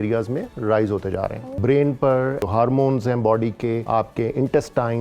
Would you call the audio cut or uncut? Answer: cut